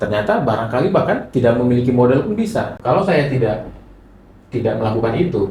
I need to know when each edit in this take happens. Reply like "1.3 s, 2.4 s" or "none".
2.7 s